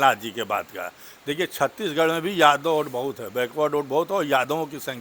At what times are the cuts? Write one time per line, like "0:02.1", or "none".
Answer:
none